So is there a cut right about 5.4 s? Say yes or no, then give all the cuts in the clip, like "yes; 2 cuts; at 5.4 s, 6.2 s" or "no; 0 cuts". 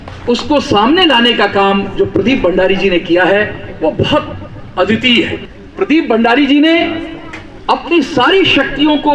yes; 1 cut; at 5.4 s